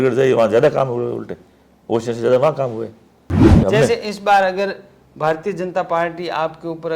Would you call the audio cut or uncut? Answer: cut